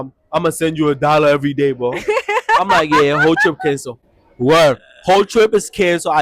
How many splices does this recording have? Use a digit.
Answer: 0